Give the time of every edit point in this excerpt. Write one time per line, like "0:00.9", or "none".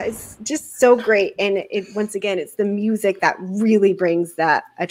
none